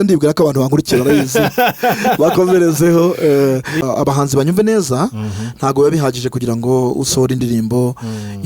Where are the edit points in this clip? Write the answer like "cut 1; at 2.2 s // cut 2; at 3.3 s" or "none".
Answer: cut 1; at 3.8 s